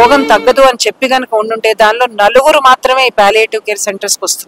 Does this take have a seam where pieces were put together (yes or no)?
no